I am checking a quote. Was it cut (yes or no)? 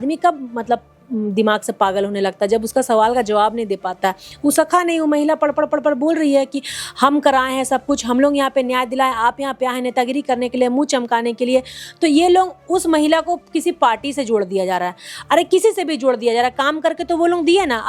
no